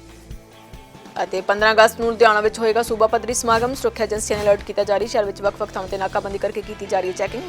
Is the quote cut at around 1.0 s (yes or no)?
yes